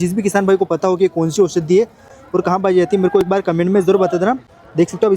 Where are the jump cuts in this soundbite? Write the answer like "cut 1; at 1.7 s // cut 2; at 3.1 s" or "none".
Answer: none